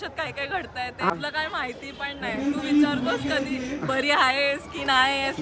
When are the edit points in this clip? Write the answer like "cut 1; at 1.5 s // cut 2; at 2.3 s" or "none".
cut 1; at 1.1 s